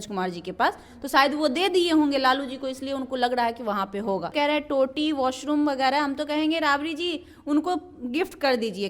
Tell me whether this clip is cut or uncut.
cut